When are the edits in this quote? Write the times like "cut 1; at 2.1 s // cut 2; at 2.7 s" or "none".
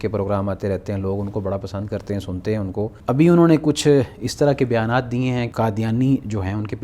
cut 1; at 3.0 s // cut 2; at 5.5 s